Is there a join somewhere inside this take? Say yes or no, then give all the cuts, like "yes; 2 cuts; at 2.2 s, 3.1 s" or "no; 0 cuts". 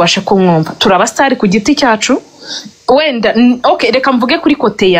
no; 0 cuts